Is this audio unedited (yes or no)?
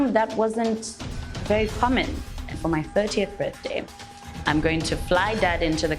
no